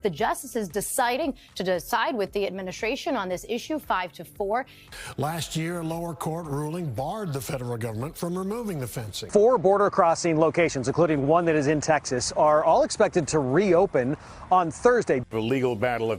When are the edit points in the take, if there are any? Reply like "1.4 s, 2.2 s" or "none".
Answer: 4.8 s, 9.2 s, 15.2 s